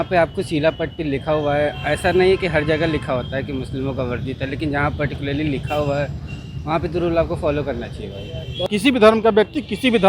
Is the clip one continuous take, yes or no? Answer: no